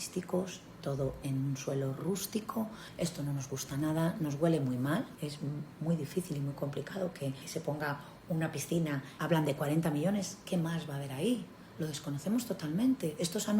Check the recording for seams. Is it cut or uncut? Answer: cut